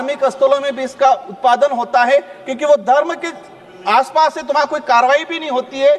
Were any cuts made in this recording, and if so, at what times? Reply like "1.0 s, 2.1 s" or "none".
none